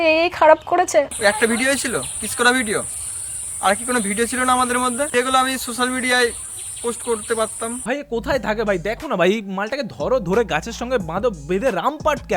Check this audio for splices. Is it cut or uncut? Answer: cut